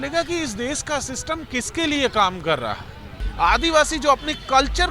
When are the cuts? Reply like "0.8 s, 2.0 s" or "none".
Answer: 3.2 s